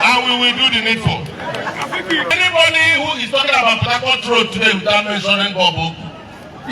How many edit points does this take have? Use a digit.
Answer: 1